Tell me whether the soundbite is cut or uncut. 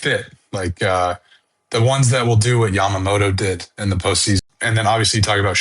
cut